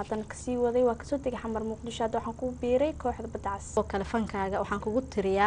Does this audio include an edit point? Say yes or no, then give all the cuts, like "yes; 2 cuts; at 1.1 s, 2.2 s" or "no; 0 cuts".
yes; 1 cut; at 3.8 s